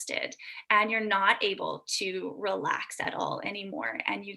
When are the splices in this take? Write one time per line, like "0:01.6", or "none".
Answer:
none